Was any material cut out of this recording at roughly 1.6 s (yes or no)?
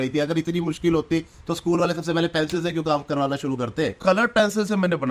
no